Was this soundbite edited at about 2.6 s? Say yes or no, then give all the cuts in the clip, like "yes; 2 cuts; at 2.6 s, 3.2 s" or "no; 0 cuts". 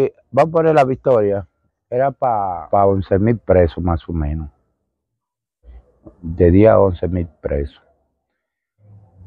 yes; 1 cut; at 2.6 s